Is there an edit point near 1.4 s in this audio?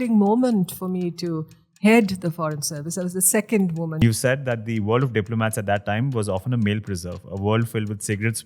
no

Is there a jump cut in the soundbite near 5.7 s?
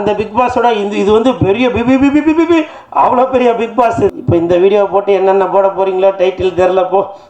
no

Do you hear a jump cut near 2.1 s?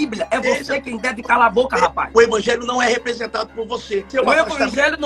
yes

